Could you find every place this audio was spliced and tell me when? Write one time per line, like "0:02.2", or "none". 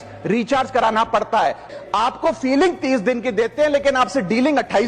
0:01.7